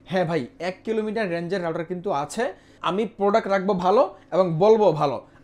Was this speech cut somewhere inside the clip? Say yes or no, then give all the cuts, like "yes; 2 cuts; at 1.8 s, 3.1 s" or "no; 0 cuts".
yes; 1 cut; at 2.7 s